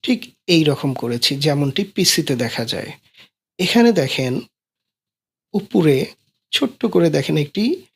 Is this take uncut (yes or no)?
yes